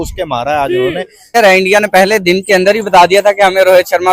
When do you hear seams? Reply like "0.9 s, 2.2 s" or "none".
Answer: 1.3 s